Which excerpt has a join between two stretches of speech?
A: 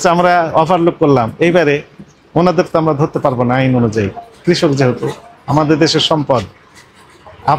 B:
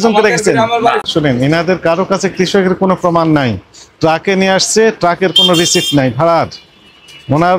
B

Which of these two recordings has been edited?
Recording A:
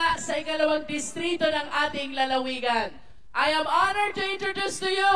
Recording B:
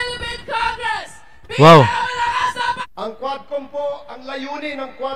B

